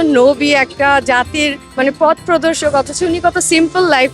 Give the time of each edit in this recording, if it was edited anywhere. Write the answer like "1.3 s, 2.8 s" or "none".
1.6 s